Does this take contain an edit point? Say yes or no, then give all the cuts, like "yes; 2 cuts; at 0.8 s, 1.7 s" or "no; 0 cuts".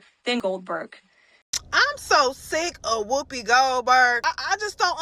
yes; 1 cut; at 1.3 s